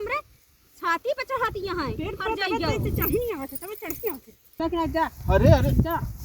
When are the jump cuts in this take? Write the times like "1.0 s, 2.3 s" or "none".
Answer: 4.6 s

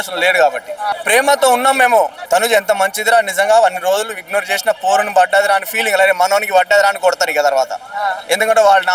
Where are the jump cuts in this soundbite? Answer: 0.9 s, 2.2 s

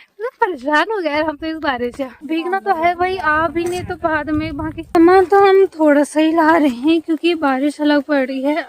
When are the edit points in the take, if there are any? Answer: 2.2 s, 4.9 s

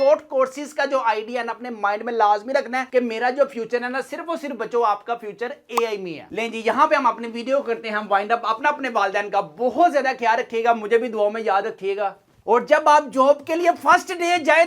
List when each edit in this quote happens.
none

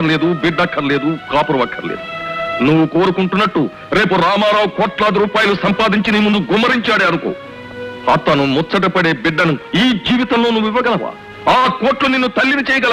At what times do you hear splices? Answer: none

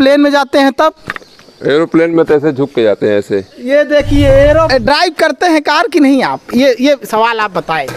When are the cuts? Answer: 4.7 s

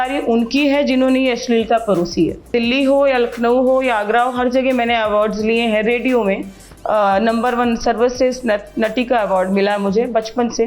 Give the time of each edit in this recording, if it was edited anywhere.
2.5 s

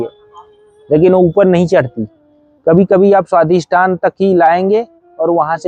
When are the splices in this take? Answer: none

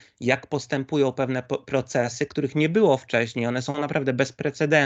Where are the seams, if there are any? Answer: none

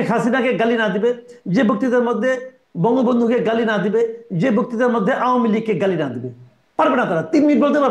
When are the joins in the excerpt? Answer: none

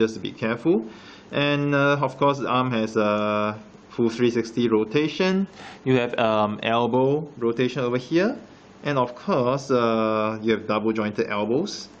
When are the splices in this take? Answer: 9.3 s

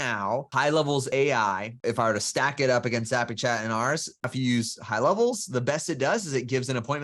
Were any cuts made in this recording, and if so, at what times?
1.7 s, 4.3 s

